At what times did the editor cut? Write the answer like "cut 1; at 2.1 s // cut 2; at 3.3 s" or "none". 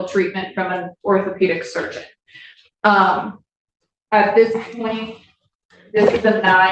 none